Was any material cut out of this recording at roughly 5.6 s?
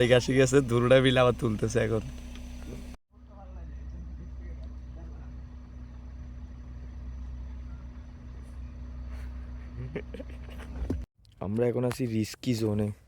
no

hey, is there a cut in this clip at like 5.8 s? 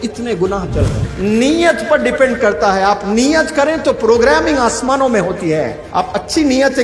yes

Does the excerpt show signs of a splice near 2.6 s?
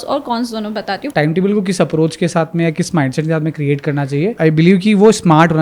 no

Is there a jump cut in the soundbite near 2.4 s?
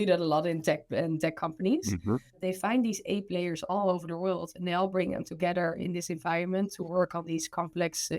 yes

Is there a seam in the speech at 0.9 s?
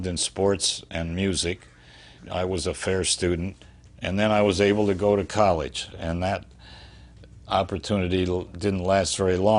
no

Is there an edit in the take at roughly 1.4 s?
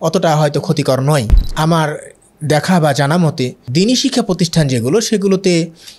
yes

